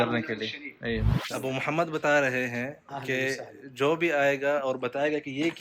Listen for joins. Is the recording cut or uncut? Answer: cut